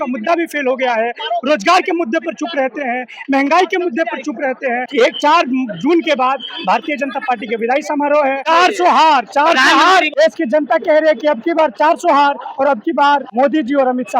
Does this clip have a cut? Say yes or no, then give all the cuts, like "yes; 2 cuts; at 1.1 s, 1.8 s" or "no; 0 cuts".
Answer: yes; 4 cuts; at 4.9 s, 8.4 s, 10.1 s, 13.3 s